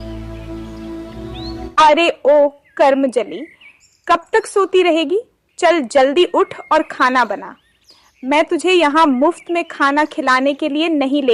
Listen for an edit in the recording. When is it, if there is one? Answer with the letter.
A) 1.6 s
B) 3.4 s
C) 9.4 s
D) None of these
A